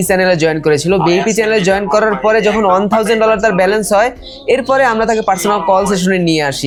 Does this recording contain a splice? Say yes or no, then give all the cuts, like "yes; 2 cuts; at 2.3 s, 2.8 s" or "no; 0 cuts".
no; 0 cuts